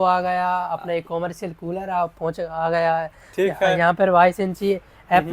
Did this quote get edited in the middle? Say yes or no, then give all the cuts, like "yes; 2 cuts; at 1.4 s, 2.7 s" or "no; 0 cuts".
no; 0 cuts